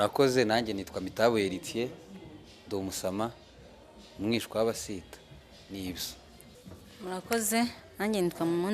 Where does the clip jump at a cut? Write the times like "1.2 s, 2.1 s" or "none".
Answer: 6.5 s